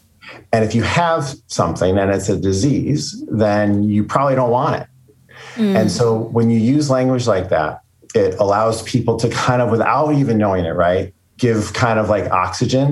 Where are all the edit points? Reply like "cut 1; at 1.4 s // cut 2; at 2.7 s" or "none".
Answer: cut 1; at 11.3 s